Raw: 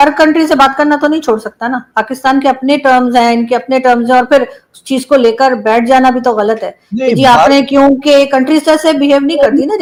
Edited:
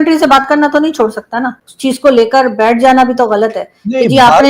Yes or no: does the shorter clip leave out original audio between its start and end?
yes